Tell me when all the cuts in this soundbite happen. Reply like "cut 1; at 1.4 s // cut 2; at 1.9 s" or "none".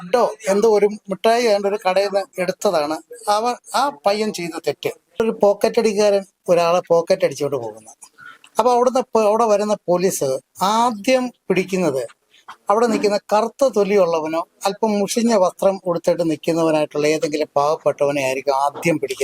cut 1; at 5.2 s